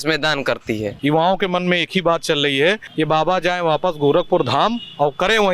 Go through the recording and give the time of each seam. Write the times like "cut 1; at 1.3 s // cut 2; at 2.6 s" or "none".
cut 1; at 0.9 s // cut 2; at 2.9 s